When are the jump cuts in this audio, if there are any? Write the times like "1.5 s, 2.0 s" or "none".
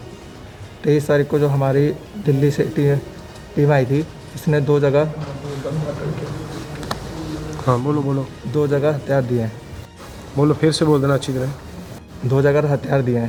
none